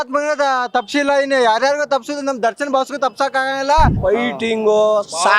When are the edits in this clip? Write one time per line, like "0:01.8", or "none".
0:04.0

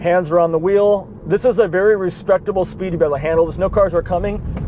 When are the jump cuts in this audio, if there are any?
none

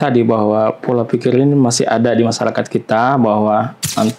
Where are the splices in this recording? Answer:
none

